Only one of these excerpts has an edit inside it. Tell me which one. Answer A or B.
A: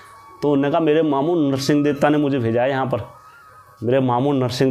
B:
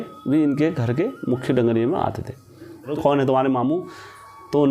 B